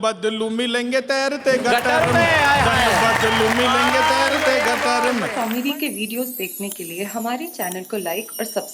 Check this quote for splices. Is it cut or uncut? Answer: cut